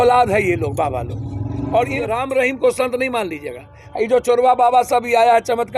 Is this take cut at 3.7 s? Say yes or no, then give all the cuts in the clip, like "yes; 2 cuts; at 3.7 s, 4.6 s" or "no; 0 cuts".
no; 1 cut; at 2.2 s